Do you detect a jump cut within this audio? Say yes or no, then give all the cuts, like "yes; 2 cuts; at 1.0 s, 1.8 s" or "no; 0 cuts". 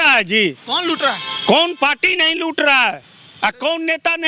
no; 0 cuts